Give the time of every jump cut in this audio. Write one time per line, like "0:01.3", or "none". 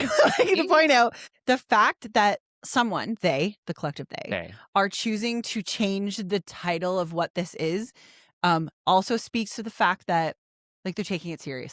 0:01.3
0:02.5

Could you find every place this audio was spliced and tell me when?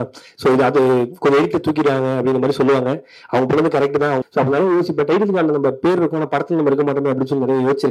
0:04.2

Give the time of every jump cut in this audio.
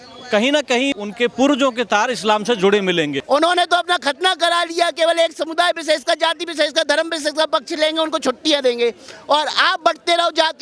0:01.0
0:03.2

